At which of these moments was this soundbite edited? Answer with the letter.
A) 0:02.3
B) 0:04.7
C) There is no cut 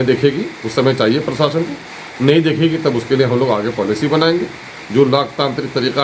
C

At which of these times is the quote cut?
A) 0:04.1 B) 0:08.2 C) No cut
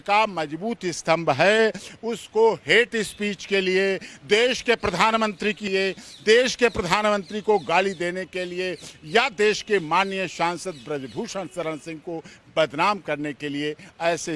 C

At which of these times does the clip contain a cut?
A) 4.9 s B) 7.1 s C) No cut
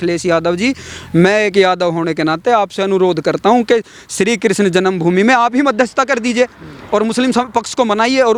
C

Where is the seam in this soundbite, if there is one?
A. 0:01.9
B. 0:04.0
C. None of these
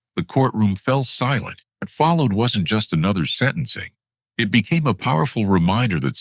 A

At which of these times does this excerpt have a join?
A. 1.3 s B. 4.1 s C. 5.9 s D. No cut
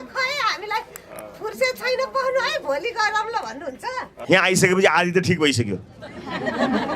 B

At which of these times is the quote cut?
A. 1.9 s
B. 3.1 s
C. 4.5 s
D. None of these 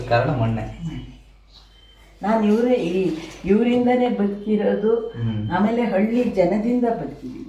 D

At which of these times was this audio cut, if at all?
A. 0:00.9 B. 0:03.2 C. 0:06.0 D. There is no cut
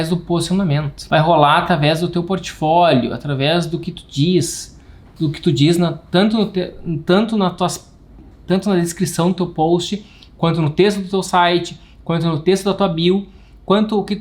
A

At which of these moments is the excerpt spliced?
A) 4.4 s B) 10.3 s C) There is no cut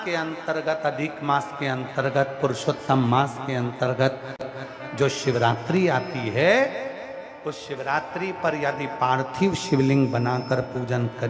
A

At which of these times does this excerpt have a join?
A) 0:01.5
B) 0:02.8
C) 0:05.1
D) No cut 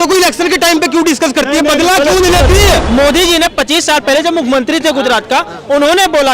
B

